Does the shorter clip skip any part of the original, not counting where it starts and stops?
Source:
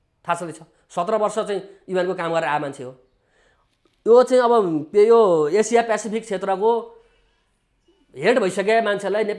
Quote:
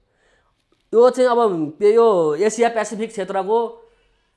no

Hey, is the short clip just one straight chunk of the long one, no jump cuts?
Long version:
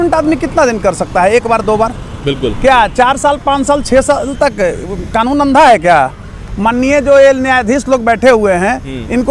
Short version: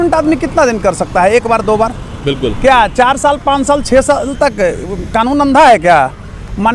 yes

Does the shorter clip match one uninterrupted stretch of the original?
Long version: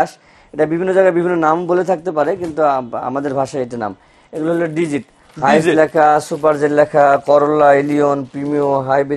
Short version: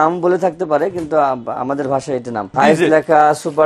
no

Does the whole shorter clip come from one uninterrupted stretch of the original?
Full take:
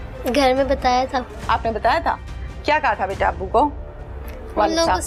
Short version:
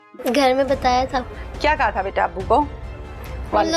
no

